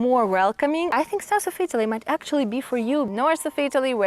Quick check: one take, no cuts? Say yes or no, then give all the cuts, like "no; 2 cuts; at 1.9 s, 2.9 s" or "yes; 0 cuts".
no; 2 cuts; at 0.9 s, 3.1 s